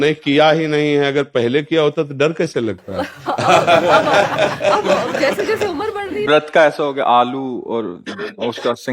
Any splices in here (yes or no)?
yes